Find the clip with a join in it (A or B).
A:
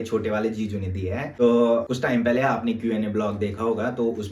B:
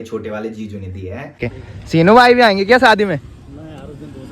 B